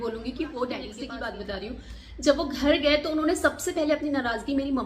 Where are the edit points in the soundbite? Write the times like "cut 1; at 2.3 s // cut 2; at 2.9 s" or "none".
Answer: cut 1; at 0.9 s